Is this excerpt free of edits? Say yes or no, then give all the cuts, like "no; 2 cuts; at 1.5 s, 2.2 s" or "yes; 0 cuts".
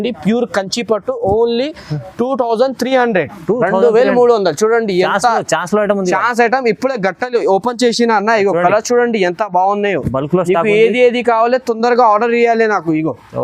yes; 0 cuts